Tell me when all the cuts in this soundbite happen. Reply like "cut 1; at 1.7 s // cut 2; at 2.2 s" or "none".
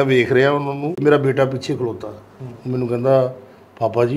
cut 1; at 1.0 s